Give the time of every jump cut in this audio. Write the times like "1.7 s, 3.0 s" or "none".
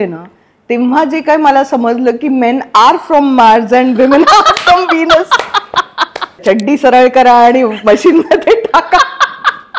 6.4 s